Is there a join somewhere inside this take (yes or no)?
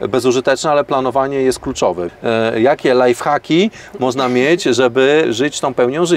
yes